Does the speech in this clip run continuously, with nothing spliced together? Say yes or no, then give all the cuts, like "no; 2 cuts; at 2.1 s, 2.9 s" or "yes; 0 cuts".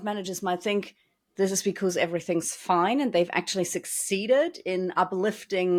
yes; 0 cuts